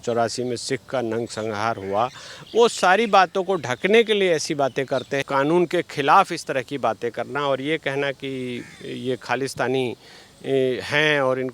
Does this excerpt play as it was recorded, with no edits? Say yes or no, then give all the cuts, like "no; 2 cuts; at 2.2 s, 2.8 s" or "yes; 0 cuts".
no; 1 cut; at 5.2 s